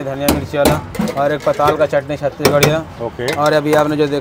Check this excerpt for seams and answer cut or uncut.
uncut